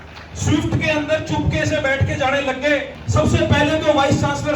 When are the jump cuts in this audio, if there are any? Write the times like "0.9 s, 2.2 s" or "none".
3.0 s